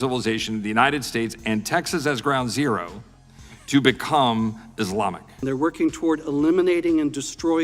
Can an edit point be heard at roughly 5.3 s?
yes; 1 cut; at 5.3 s

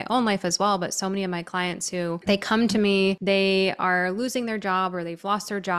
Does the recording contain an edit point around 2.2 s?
yes; 2 cuts; at 2.2 s, 3.2 s

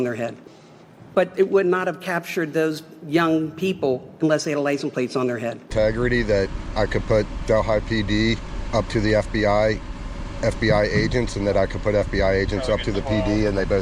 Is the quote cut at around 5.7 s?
yes; 1 cut; at 5.7 s

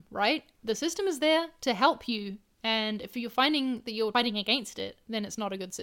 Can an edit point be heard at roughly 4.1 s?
yes; 1 cut; at 4.1 s

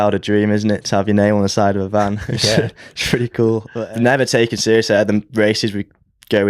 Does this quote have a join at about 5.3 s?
no; 1 cut; at 3.7 s

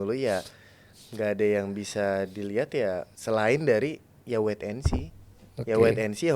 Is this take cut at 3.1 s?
yes; 1 cut; at 3.1 s

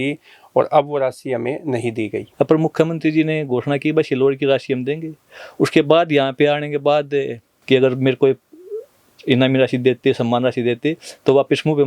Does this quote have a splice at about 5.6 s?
no; 2 cuts; at 2.2 s, 7.5 s

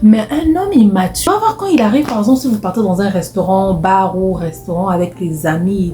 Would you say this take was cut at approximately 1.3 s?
yes; 1 cut; at 1.3 s

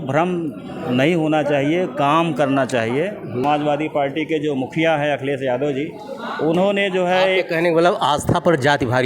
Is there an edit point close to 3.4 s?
yes; 1 cut; at 3.4 s

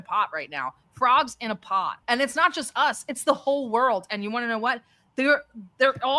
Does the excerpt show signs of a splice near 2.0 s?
yes; 1 cut; at 2.0 s

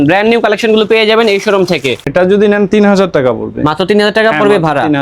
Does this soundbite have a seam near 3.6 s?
no; 1 cut; at 2.0 s

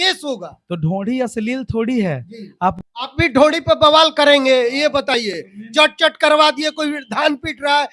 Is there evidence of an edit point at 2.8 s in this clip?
yes; 1 cut; at 2.8 s

